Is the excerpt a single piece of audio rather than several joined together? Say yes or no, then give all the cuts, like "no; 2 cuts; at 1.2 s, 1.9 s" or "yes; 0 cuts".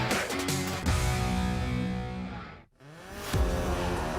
no; 1 cut; at 2.5 s